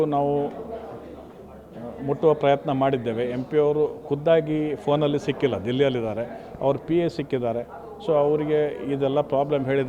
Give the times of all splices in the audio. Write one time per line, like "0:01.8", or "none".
none